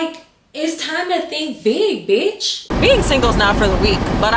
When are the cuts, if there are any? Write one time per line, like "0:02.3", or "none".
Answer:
0:02.7